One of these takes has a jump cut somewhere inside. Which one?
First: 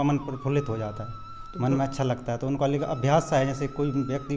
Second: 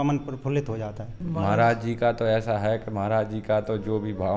second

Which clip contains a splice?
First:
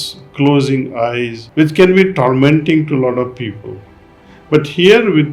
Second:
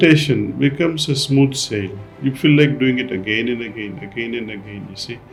first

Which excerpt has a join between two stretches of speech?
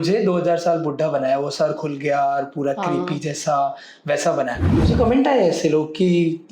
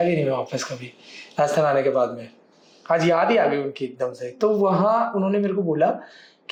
first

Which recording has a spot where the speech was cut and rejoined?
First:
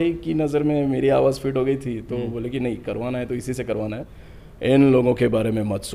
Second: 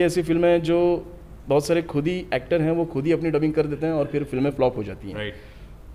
first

